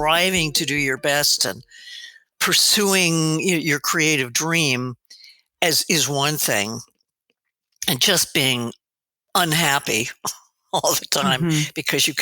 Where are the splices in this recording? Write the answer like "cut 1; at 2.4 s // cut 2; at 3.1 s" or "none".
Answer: cut 1; at 2.4 s